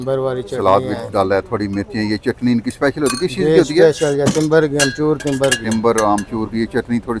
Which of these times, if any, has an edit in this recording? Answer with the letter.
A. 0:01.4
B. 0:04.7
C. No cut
C